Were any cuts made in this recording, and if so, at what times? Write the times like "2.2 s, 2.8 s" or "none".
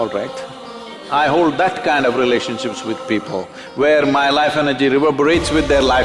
1.0 s